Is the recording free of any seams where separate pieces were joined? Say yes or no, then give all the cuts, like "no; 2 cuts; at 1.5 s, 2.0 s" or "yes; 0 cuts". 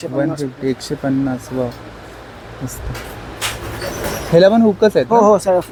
yes; 0 cuts